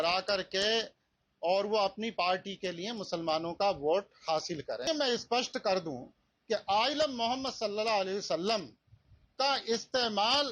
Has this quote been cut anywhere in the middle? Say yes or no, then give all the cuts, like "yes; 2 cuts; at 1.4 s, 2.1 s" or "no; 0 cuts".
yes; 1 cut; at 4.8 s